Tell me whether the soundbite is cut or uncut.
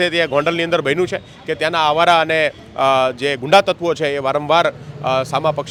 uncut